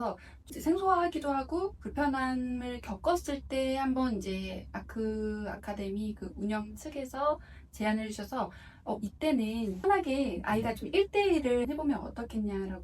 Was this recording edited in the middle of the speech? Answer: no; 0 cuts

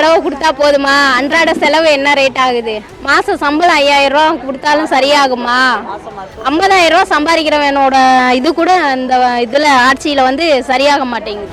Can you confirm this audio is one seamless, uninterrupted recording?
yes; 0 cuts

